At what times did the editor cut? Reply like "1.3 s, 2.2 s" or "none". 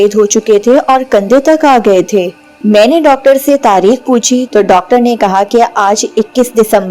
none